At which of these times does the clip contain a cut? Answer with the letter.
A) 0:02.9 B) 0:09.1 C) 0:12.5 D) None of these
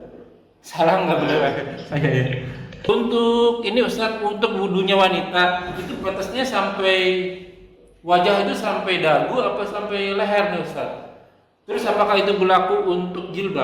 A